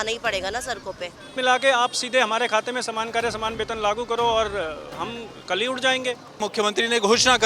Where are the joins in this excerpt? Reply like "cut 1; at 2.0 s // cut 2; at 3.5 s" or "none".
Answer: cut 1; at 1.3 s // cut 2; at 6.4 s

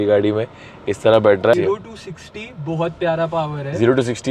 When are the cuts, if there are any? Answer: cut 1; at 1.5 s

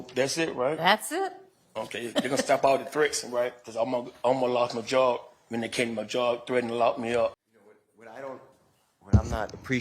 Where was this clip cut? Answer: cut 1; at 7.5 s

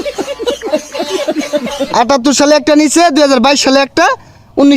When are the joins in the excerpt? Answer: cut 1; at 1.5 s

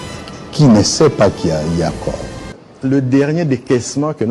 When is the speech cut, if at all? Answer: cut 1; at 2.3 s

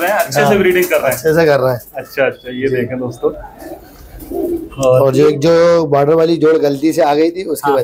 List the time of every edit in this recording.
none

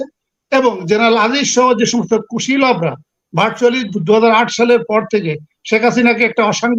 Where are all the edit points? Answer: none

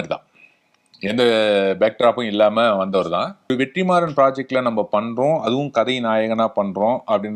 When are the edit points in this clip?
cut 1; at 3.5 s

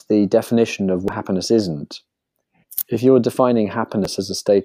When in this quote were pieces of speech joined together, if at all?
none

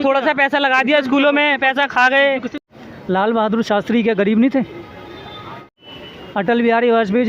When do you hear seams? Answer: cut 1; at 2.5 s // cut 2; at 5.7 s

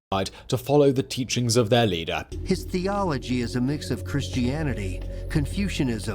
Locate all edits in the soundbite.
cut 1; at 2.3 s

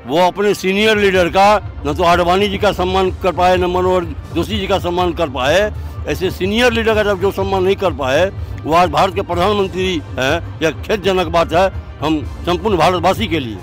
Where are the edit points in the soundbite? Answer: none

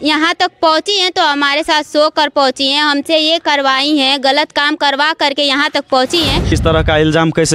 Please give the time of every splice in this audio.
cut 1; at 6.6 s

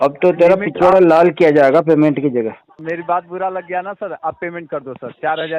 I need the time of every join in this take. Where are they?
cut 1; at 2.7 s

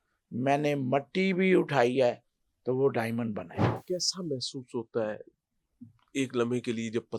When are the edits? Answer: cut 1; at 3.6 s

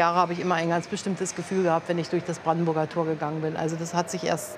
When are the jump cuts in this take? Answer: none

